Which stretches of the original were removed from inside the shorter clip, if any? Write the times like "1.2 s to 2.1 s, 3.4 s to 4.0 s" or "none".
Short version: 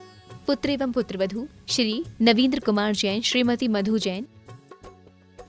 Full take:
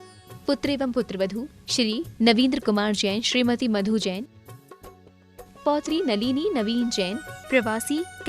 none